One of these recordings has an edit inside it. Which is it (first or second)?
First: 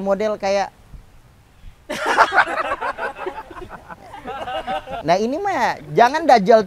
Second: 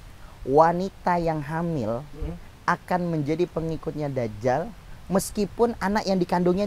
first